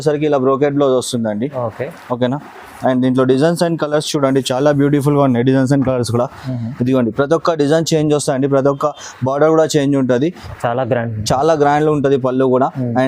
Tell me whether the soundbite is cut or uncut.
cut